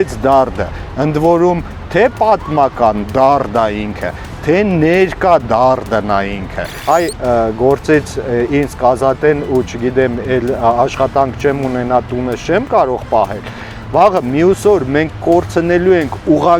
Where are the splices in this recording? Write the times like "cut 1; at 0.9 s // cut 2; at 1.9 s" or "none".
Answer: cut 1; at 6.7 s